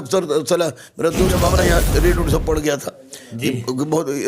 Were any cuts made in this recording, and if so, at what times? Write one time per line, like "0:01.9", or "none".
0:01.4